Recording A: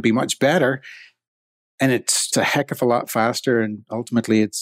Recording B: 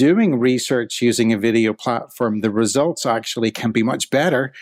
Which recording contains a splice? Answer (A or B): A